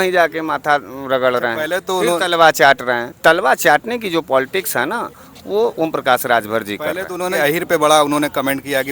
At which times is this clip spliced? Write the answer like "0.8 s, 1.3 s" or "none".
3.1 s, 7.3 s